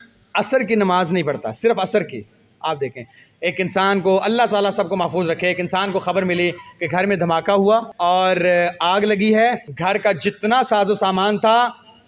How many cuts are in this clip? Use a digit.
2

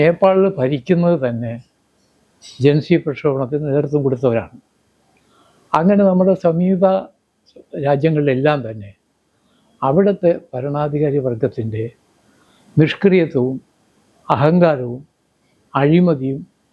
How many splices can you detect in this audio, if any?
0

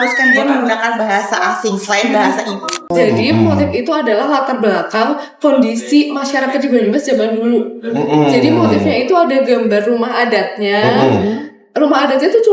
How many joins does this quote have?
1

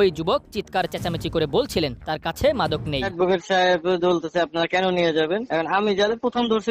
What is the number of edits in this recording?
1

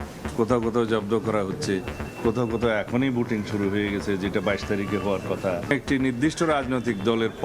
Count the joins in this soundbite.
1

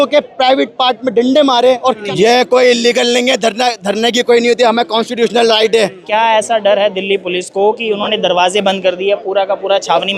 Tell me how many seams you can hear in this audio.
2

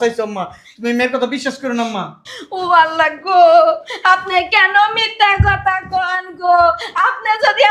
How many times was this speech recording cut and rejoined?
0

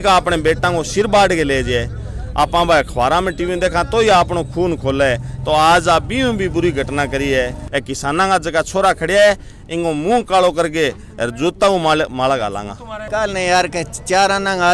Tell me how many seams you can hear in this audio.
2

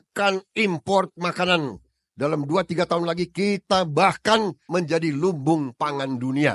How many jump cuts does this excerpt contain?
1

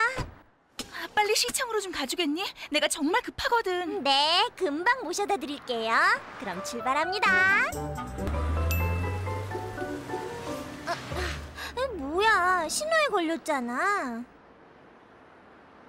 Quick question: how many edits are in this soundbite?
2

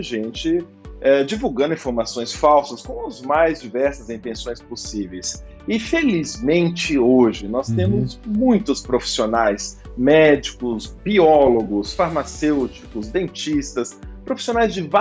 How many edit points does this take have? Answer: 0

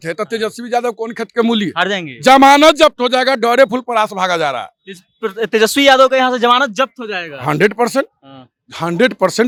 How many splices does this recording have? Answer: 0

